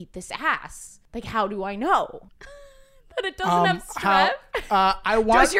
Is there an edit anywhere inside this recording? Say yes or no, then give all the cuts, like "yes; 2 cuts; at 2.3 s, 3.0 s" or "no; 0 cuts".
no; 0 cuts